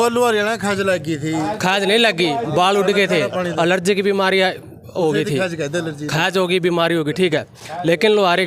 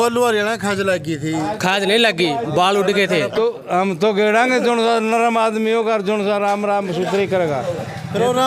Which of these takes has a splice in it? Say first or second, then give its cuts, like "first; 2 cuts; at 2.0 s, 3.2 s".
second; 1 cut; at 3.3 s